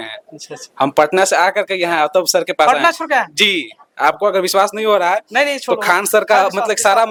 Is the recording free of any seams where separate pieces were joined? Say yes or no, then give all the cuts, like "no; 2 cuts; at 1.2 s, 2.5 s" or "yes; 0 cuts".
yes; 0 cuts